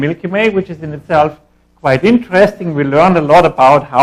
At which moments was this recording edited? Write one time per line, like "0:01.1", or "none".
0:02.5

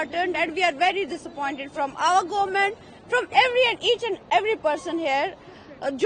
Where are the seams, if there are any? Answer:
none

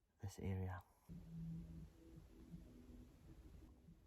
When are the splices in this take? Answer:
0:01.0

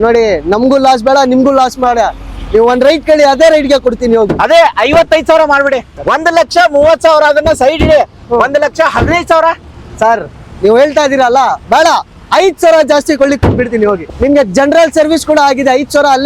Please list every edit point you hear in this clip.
0:05.9
0:14.0

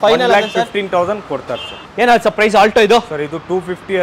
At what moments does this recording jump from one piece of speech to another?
0:01.8

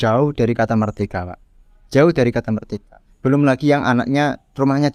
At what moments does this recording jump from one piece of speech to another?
none

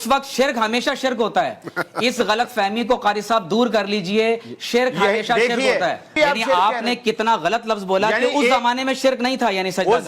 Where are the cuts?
0:06.1

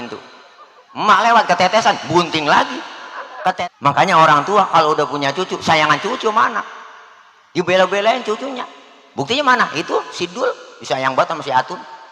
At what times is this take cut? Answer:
0:03.6

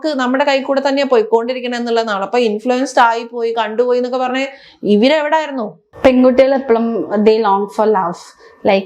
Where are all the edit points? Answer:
0:05.8

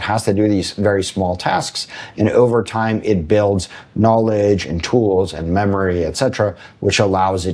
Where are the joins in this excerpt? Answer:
none

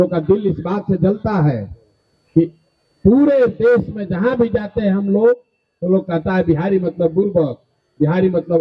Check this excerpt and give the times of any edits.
none

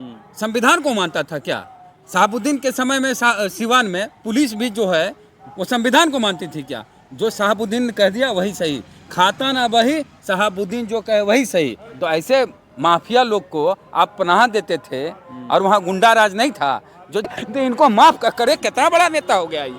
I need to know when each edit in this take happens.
0:17.3

